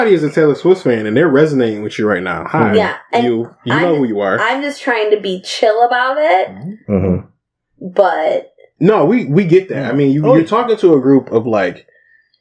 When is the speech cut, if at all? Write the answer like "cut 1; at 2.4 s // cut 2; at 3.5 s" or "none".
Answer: none